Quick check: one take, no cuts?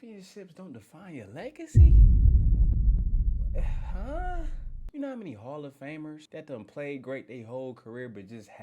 no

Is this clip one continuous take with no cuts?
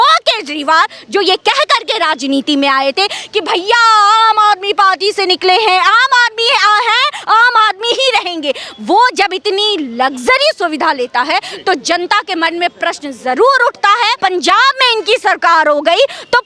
no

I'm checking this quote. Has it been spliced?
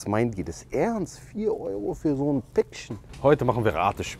yes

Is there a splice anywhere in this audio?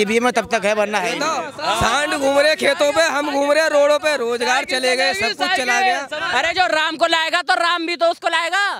yes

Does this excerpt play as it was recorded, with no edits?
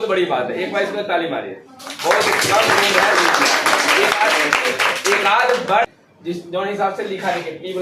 no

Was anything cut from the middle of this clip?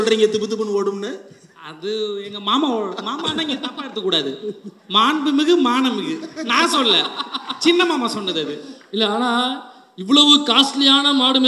no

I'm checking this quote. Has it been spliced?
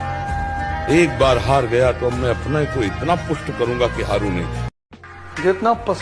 yes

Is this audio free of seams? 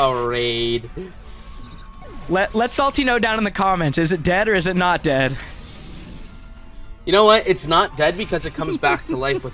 yes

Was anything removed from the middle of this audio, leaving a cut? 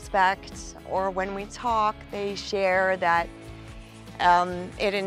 no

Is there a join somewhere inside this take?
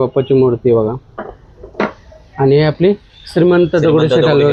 no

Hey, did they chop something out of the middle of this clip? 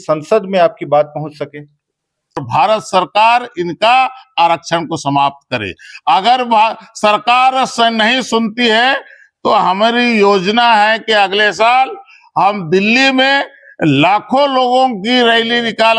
yes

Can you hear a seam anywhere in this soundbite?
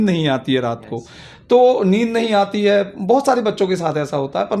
no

